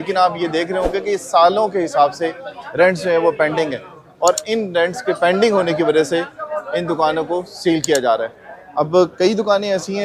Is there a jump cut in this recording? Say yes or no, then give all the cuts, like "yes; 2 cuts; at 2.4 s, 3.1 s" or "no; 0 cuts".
no; 0 cuts